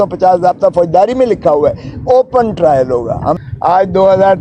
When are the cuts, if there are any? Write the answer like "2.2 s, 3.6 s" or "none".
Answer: 3.4 s